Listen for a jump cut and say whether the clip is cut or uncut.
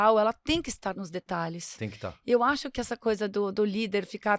cut